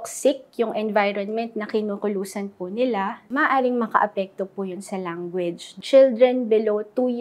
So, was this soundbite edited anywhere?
yes; 2 cuts; at 3.2 s, 5.7 s

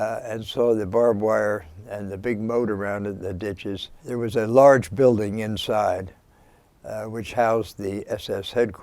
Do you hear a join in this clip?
yes; 1 cut; at 3.9 s

